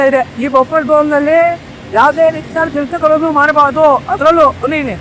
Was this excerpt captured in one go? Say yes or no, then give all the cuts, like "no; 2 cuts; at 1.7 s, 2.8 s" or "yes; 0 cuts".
yes; 0 cuts